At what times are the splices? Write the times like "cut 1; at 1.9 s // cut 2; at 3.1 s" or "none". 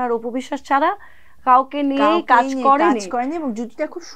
none